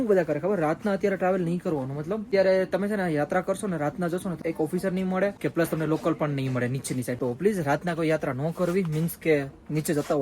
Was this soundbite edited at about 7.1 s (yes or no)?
yes